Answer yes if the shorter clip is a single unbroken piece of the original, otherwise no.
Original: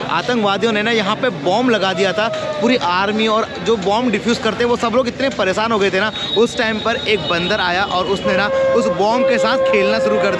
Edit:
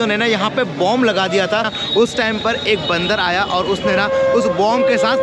no